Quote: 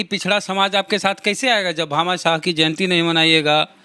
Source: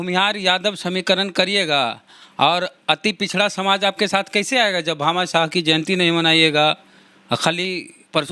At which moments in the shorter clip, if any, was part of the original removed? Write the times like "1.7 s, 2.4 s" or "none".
none